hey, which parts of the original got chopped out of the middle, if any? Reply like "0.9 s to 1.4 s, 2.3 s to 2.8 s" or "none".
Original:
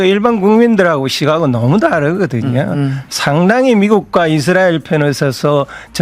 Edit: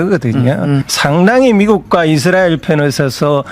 3.0 s to 3.1 s